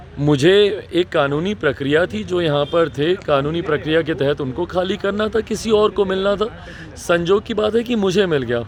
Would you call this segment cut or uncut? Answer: uncut